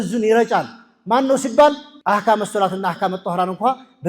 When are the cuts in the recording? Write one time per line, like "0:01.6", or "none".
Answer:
0:01.9

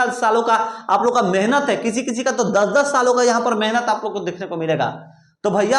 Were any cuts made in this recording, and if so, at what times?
none

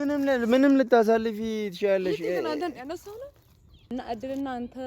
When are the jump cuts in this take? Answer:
0:03.9

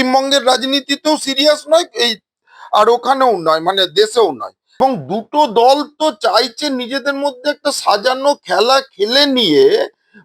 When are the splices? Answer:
0:04.6

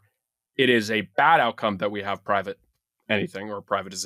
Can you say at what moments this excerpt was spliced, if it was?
none

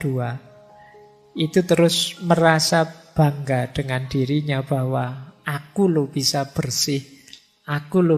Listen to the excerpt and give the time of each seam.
0:03.0

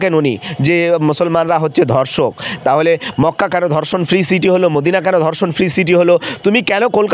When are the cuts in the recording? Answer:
none

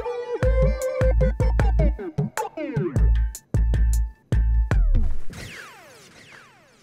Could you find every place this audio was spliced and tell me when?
none

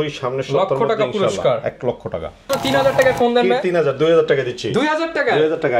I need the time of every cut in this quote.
0:02.5

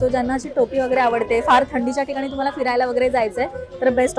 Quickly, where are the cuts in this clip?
none

